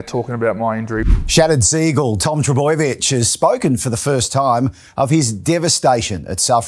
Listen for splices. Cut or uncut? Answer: cut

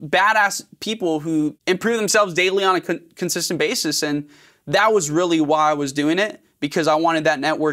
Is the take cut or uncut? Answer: cut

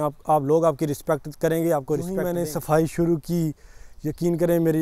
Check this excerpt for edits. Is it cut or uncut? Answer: cut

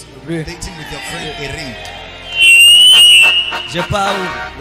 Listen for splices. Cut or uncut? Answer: uncut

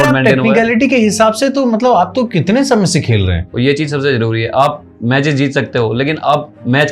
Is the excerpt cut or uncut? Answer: cut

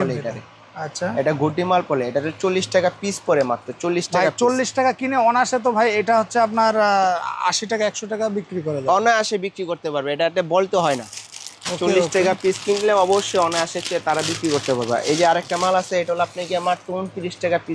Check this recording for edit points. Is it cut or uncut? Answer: uncut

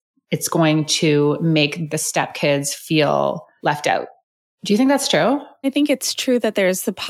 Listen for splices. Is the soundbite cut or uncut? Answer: cut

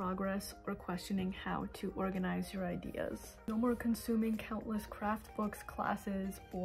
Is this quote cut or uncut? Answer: uncut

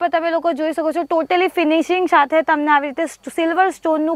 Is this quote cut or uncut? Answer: uncut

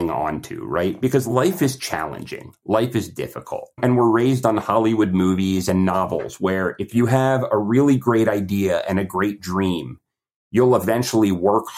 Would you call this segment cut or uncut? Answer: cut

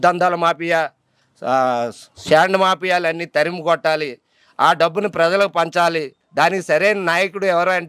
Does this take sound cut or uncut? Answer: uncut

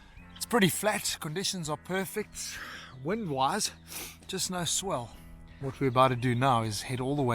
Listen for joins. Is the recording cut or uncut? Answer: cut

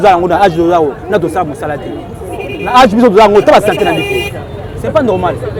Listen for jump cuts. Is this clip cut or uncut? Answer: uncut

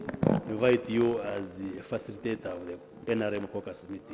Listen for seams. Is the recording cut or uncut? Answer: uncut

